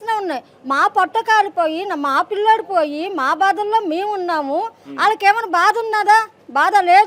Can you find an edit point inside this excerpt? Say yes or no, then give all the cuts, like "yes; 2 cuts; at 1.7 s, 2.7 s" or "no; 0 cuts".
no; 0 cuts